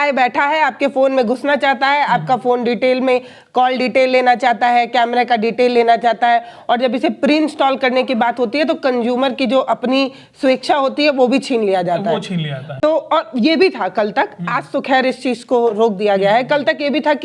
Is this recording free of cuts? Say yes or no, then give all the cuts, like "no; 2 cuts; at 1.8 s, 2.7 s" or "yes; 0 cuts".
yes; 0 cuts